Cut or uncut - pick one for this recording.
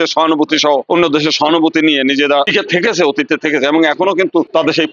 cut